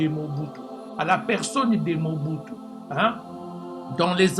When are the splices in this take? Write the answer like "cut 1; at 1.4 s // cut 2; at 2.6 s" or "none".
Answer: none